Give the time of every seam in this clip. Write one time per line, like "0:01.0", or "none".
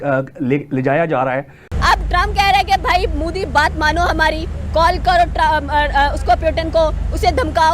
none

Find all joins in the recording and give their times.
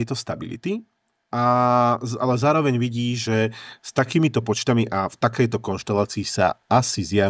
none

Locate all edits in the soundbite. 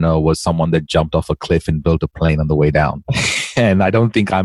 0:03.1

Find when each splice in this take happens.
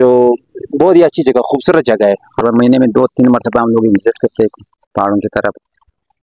0:02.4

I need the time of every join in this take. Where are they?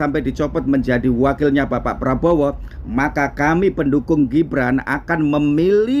none

